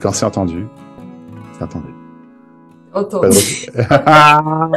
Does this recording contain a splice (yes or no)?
no